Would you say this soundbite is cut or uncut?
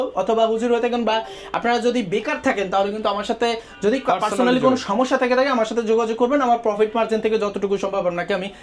uncut